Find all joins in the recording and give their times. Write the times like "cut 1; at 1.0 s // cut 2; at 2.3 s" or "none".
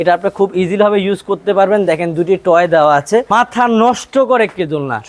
cut 1; at 3.3 s